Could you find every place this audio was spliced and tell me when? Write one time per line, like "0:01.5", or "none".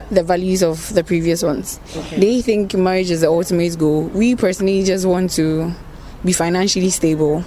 none